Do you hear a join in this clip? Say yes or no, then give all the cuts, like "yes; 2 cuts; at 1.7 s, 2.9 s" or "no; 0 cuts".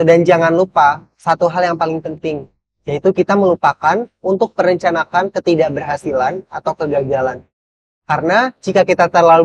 no; 0 cuts